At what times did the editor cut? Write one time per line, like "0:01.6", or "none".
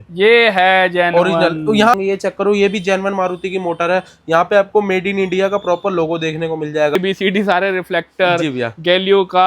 0:01.9
0:07.0